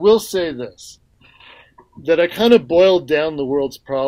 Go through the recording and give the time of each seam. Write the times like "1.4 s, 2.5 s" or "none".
1.1 s